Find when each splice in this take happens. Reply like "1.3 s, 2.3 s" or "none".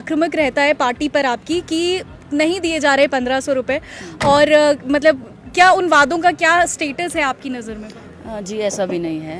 none